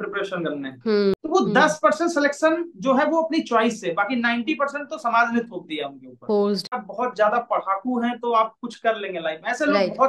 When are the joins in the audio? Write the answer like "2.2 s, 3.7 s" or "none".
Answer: 1.2 s, 6.7 s